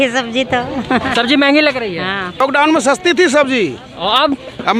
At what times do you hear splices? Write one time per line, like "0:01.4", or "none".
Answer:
0:02.4